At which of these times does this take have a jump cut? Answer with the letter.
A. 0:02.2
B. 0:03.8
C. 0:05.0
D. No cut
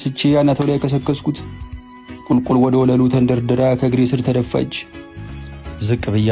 D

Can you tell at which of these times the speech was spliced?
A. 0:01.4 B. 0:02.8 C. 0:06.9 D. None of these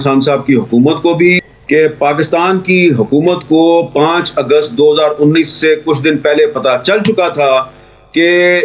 A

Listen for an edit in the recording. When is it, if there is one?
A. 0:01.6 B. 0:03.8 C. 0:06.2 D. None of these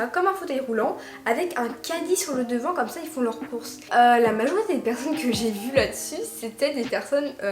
B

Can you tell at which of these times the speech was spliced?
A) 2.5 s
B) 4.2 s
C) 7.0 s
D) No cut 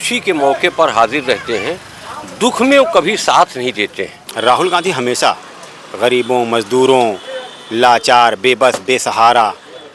B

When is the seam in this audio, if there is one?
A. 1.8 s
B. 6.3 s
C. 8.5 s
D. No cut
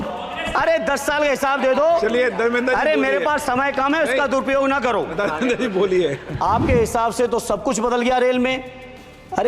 B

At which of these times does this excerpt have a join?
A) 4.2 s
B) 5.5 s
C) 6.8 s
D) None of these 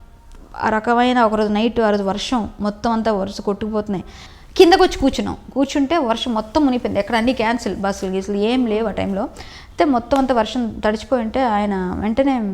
A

